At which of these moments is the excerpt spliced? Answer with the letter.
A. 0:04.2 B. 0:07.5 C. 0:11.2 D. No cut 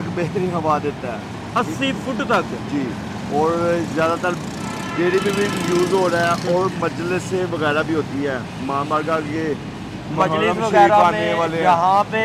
D